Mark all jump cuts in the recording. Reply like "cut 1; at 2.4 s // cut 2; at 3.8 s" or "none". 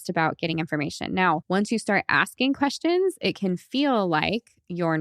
cut 1; at 1.4 s